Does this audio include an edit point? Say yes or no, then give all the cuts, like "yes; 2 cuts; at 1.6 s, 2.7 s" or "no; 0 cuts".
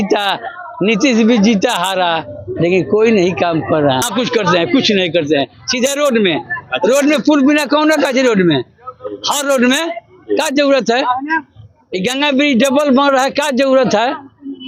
no; 0 cuts